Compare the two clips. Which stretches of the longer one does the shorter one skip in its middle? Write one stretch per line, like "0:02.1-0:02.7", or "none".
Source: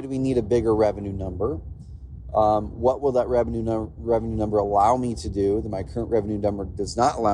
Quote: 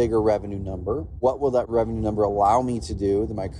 0:02.1-0:03.9